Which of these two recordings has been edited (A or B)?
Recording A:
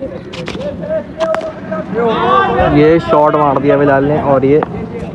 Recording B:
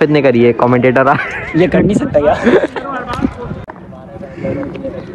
B